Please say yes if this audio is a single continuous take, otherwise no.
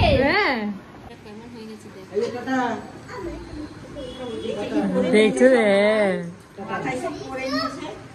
no